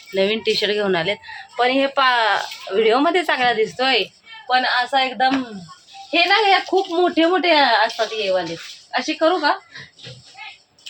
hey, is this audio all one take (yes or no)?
yes